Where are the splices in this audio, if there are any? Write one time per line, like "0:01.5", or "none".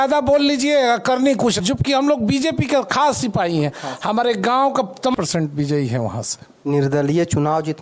0:01.6
0:05.1